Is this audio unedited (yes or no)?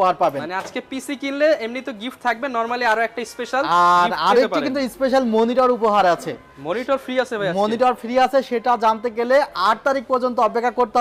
yes